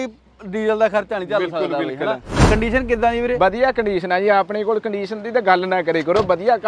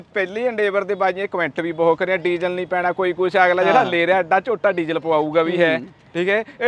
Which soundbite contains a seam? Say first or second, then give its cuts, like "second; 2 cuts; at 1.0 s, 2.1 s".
first; 1 cut; at 2.4 s